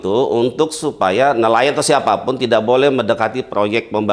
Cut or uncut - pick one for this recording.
uncut